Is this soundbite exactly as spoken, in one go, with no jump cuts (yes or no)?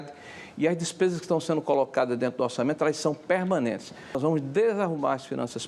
no